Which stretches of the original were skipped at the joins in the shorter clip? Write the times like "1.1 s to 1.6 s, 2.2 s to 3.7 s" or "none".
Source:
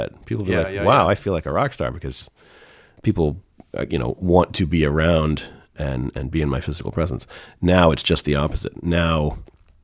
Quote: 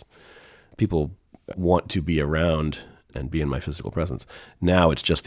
3.8 s to 4.2 s, 5.8 s to 6.1 s